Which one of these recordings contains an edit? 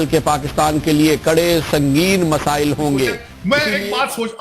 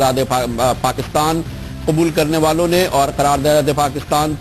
first; 1 cut; at 3.3 s

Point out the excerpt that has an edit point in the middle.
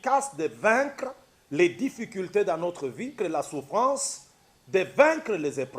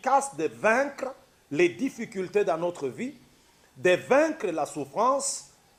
first; 1 cut; at 3.1 s

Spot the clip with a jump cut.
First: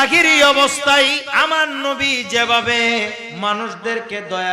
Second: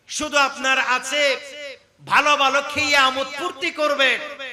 first; 2 cuts; at 1.3 s, 3.2 s

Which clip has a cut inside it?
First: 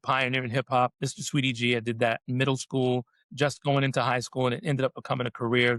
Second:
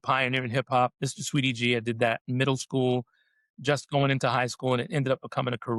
first; 1 cut; at 3.2 s

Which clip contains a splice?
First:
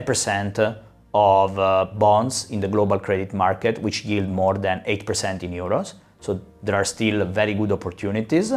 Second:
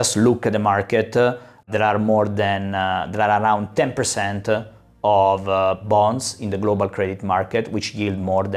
second; 1 cut; at 1.7 s

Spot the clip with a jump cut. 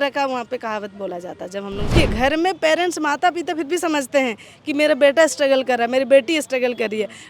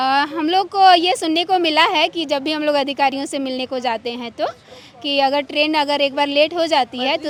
first; 1 cut; at 1.9 s

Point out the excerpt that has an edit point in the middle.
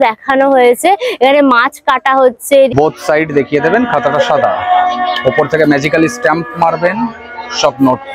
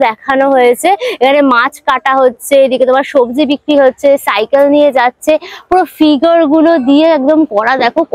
first; 1 cut; at 2.7 s

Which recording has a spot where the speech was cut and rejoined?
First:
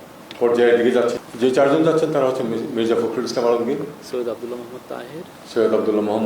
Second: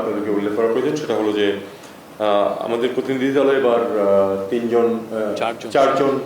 first; 1 cut; at 1.2 s

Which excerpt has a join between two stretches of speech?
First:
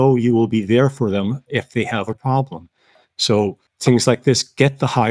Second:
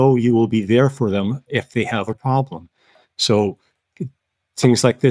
first; 1 cut; at 3.7 s

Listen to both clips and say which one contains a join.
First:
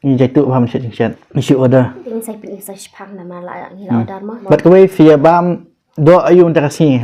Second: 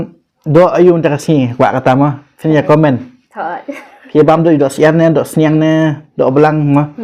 first; 3 cuts; at 1.3 s, 2.0 s, 4.4 s

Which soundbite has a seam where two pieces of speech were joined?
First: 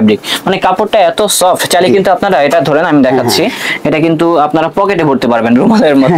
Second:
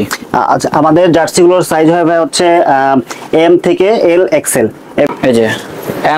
second; 1 cut; at 5.1 s

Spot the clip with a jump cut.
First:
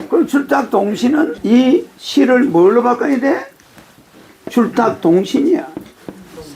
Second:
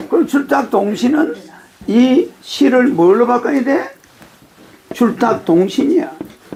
first; 1 cut; at 1.3 s

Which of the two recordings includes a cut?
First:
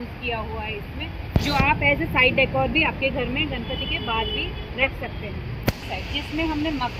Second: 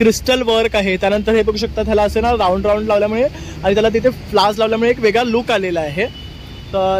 first; 1 cut; at 5.9 s

